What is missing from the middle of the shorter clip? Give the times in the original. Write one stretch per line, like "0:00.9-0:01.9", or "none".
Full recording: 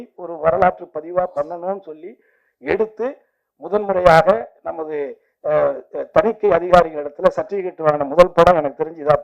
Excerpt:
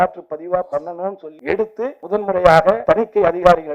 0:01.9-0:02.5
0:03.2-0:03.6
0:04.4-0:06.1